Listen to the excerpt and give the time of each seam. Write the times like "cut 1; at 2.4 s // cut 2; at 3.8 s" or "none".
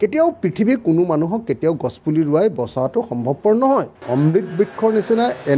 cut 1; at 4.0 s